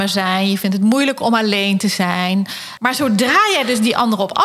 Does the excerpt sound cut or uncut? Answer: cut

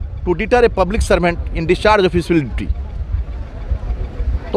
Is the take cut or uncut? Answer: uncut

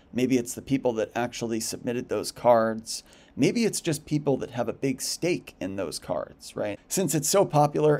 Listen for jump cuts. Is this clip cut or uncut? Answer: cut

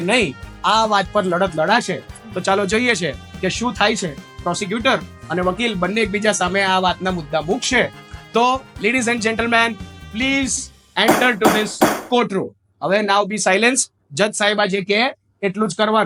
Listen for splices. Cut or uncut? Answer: uncut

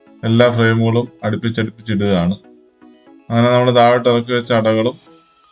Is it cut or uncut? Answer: uncut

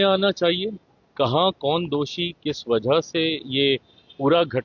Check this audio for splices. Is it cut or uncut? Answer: uncut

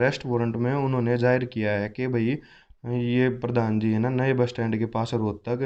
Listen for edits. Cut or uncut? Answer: uncut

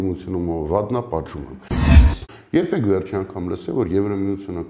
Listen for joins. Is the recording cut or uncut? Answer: cut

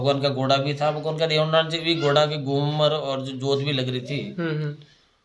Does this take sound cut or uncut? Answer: uncut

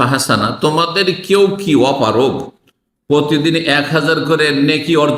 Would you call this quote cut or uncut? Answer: uncut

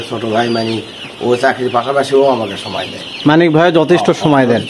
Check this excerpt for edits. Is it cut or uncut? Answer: uncut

